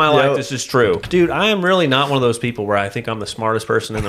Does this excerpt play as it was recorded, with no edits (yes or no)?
no